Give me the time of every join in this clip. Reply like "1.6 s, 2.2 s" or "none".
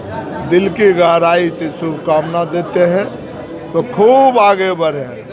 none

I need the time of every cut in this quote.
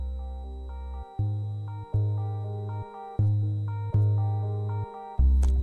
1.1 s

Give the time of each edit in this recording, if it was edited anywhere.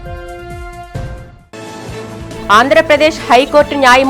0.9 s

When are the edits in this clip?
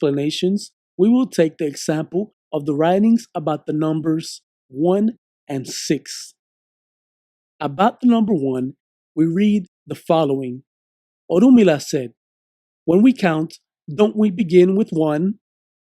3.6 s

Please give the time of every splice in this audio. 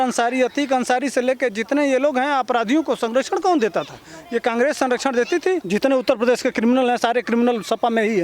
5.6 s

